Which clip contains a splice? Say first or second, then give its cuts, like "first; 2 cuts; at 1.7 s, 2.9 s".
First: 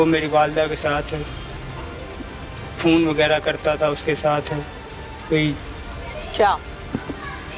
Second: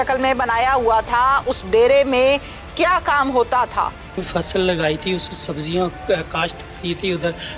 second; 1 cut; at 4.2 s